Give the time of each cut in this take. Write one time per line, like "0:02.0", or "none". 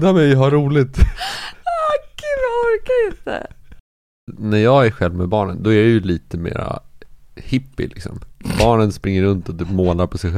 0:03.8